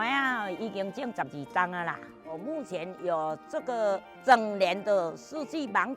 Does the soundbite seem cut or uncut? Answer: cut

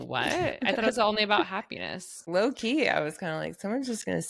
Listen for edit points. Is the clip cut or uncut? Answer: cut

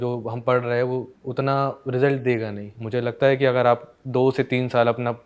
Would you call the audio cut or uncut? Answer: cut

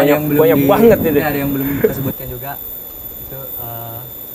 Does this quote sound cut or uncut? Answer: uncut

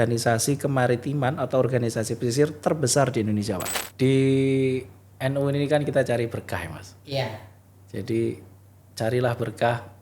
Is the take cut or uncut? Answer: cut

